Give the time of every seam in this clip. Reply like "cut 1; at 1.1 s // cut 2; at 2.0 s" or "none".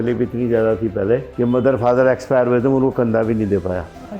none